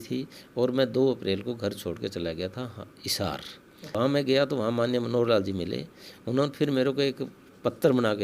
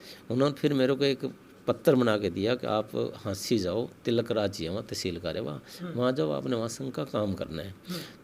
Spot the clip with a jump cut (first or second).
first